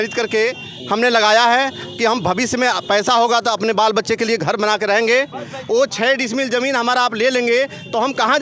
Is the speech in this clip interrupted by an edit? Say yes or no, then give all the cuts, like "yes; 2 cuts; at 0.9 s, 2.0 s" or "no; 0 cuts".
no; 0 cuts